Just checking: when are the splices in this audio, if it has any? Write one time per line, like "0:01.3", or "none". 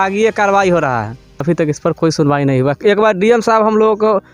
0:01.4